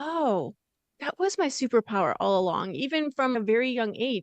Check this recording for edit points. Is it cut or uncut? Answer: cut